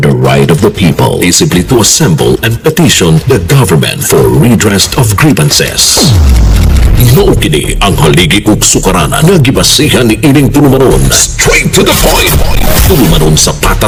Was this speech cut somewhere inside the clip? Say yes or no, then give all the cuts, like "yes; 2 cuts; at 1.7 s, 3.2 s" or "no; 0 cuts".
no; 0 cuts